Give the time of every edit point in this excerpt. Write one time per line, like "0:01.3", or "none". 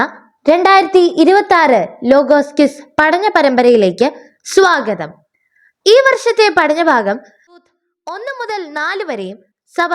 0:07.6